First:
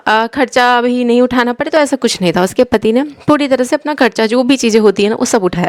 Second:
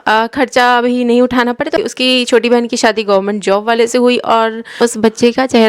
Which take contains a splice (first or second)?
second